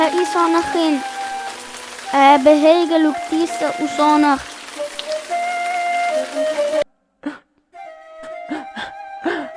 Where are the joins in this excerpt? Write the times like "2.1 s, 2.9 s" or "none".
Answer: 6.8 s